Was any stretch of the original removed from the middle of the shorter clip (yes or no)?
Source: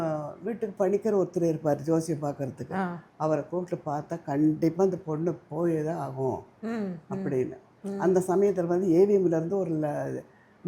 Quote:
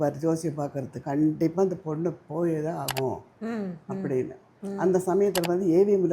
yes